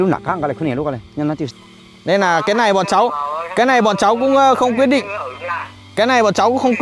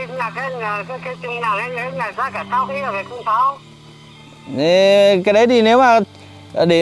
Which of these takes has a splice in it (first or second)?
first